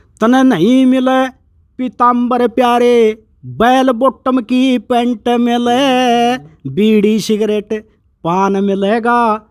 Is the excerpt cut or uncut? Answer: uncut